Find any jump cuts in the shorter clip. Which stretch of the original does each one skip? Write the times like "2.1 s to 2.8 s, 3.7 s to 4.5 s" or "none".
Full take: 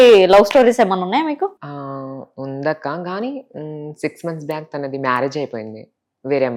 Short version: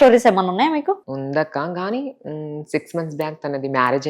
1.6 s to 2.4 s